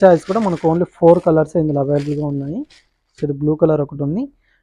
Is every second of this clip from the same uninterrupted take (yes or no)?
yes